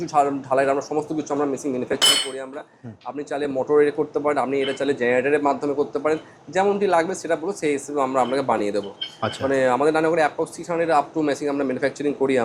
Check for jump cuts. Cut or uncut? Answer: uncut